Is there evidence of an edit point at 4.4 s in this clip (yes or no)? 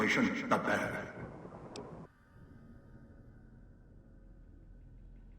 no